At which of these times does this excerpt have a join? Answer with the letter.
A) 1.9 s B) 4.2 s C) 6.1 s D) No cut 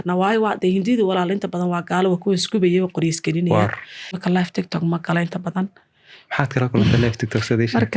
B